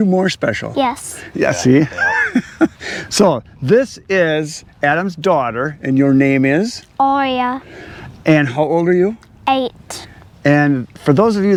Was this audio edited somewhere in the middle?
no; 0 cuts

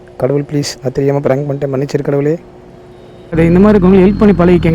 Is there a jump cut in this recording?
yes; 1 cut; at 3.3 s

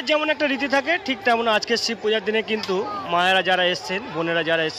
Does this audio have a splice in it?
no; 0 cuts

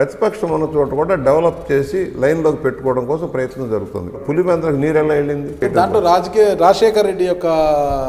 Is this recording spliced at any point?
yes; 2 cuts; at 4.2 s, 5.6 s

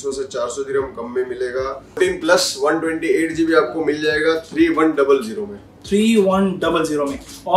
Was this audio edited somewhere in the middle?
yes; 1 cut; at 1.8 s

